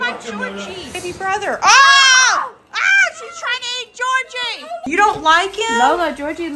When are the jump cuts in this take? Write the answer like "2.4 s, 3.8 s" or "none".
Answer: 1.0 s, 4.8 s